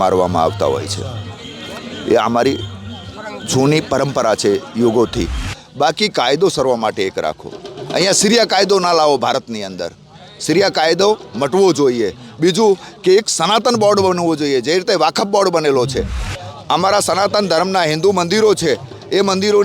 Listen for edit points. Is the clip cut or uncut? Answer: cut